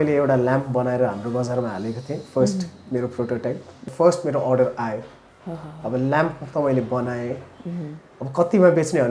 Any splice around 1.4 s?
no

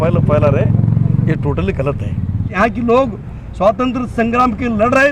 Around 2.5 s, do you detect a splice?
yes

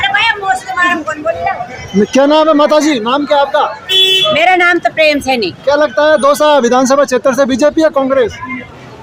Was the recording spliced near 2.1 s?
no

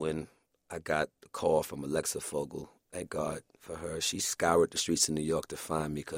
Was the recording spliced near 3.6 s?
no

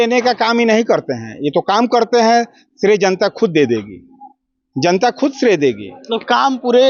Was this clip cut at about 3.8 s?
no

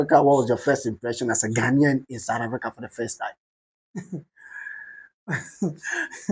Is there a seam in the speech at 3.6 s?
no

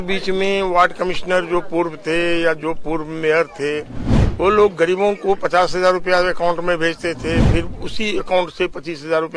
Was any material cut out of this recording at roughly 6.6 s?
no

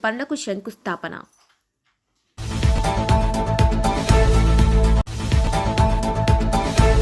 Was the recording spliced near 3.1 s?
no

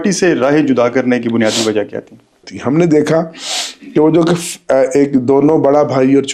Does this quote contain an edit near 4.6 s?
no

